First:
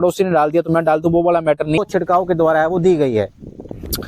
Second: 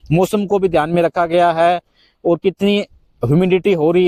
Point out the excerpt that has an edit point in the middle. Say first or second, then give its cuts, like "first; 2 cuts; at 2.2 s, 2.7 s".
first; 1 cut; at 1.8 s